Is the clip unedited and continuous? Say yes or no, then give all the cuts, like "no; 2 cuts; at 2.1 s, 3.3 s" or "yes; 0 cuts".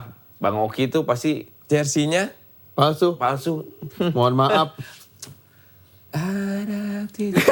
yes; 0 cuts